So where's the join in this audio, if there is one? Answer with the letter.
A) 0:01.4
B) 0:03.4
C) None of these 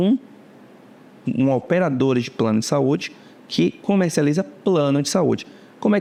C